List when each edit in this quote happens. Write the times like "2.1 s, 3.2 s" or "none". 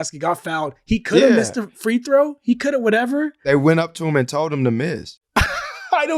3.3 s